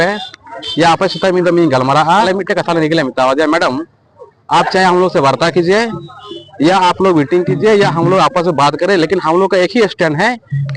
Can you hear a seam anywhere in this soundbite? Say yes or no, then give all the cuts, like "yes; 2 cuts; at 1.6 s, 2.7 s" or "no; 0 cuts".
yes; 1 cut; at 2.3 s